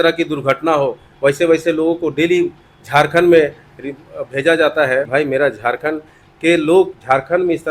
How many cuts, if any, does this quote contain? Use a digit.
1